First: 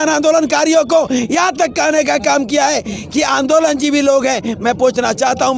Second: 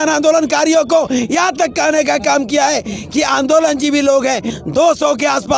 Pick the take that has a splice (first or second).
second